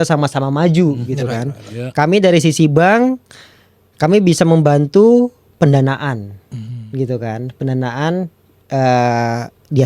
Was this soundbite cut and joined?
no; 0 cuts

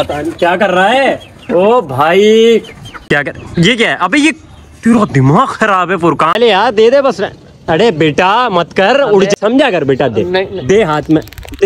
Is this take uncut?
no; 3 cuts; at 2.9 s, 6.3 s, 9.4 s

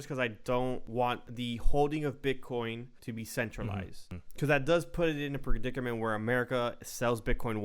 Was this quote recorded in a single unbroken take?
no; 3 cuts; at 1.1 s, 3.0 s, 4.2 s

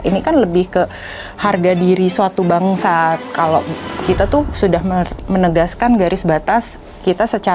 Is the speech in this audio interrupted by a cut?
no; 0 cuts

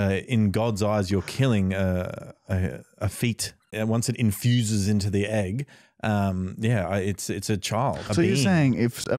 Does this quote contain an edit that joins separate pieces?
yes; 2 cuts; at 3.7 s, 8.1 s

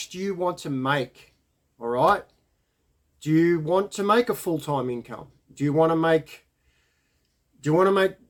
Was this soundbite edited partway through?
no; 0 cuts

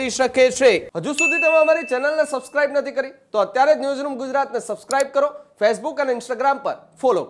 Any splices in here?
yes; 1 cut; at 0.9 s

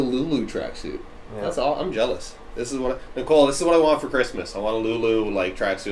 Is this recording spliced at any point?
no; 0 cuts

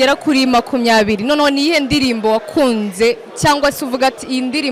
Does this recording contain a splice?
no; 0 cuts

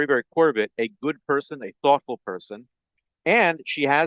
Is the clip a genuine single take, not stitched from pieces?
yes; 0 cuts

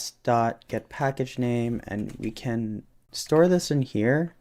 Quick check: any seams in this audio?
no; 0 cuts

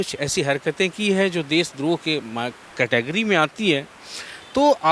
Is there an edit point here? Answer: no; 0 cuts

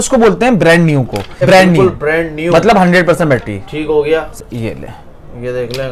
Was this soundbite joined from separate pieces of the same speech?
yes; 2 cuts; at 1.4 s, 4.4 s

